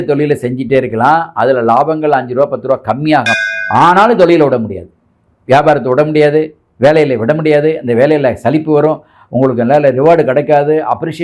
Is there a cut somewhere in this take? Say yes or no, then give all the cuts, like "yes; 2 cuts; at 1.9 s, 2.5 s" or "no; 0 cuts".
yes; 1 cut; at 3.3 s